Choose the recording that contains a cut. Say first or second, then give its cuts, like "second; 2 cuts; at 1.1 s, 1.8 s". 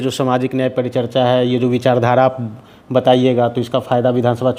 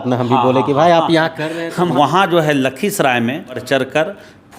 second; 2 cuts; at 1.9 s, 3.6 s